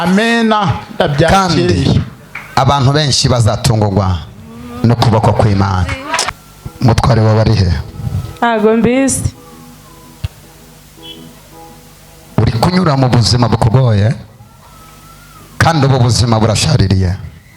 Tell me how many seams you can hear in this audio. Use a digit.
1